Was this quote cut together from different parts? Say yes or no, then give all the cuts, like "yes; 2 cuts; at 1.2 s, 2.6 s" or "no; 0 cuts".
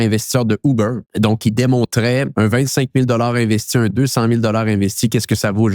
yes; 2 cuts; at 1.0 s, 2.3 s